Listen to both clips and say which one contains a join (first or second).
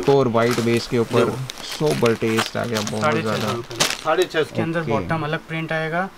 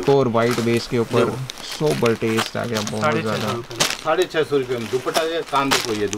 first